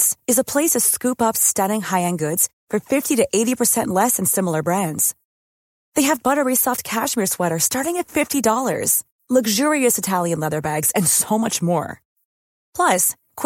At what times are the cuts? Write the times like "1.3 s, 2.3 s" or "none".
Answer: none